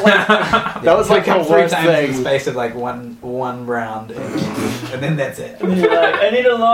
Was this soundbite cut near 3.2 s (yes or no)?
no